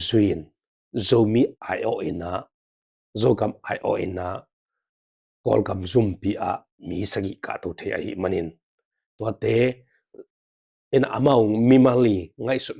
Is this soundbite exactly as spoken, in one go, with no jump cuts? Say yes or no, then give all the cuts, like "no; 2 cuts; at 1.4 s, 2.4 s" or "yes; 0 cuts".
yes; 0 cuts